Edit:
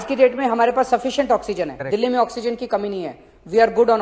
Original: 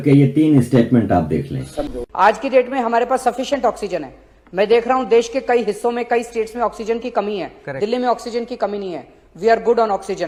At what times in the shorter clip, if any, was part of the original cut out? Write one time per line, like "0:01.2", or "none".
0:01.7